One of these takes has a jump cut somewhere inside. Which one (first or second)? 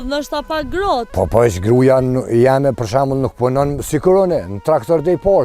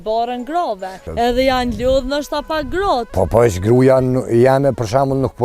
second